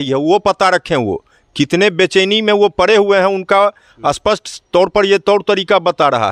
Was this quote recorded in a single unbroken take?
yes; 0 cuts

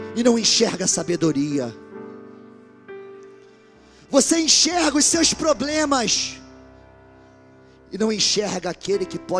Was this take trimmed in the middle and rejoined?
no; 0 cuts

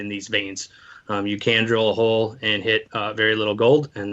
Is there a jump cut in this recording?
yes; 1 cut; at 2.9 s

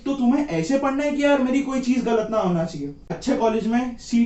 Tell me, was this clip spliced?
yes; 1 cut; at 3.2 s

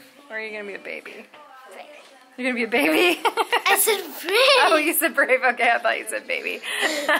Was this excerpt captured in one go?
yes; 0 cuts

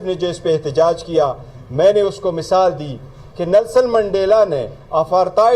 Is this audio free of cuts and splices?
yes; 0 cuts

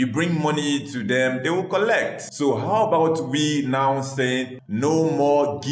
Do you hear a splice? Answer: yes; 2 cuts; at 2.2 s, 4.6 s

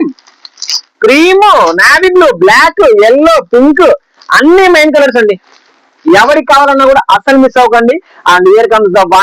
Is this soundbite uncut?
yes; 0 cuts

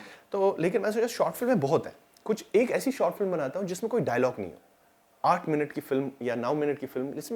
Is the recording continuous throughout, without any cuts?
yes; 0 cuts

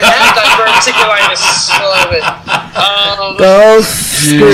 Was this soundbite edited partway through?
no; 0 cuts

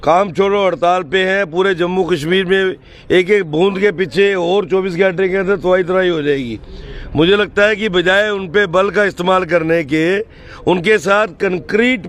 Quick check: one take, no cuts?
yes; 0 cuts

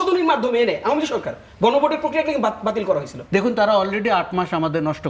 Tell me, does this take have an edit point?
yes; 1 cut; at 3.2 s

